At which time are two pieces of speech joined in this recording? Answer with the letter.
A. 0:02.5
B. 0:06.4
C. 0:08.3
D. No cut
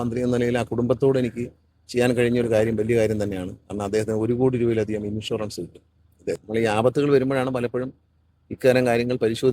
B